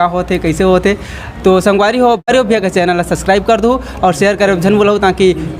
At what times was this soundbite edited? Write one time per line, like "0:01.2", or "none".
0:02.3